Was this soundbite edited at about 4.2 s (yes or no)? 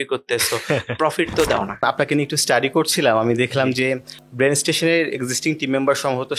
no